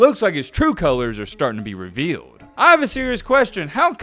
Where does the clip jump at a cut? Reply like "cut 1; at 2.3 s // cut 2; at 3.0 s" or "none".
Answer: cut 1; at 2.5 s